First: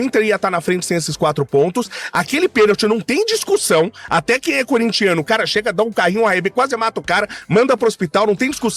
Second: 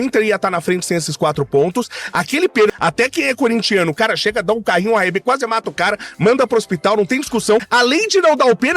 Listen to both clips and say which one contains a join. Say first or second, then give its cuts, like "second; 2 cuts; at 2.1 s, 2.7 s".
second; 2 cuts; at 2.7 s, 7.7 s